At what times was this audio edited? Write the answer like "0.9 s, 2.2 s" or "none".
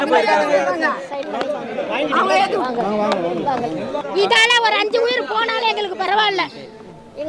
4.0 s